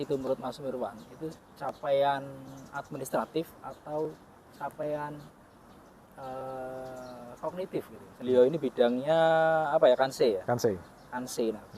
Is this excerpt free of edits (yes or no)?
no